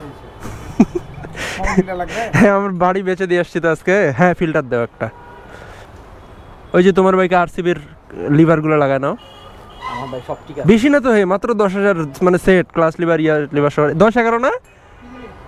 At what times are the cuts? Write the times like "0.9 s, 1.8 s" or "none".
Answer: none